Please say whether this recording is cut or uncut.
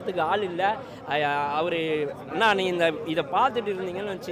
cut